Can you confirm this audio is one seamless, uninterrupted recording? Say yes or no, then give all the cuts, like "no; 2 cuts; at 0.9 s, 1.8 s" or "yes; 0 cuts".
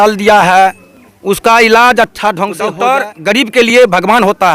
no; 1 cut; at 2.7 s